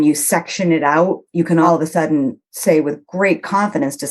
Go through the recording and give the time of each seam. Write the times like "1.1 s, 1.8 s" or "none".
1.7 s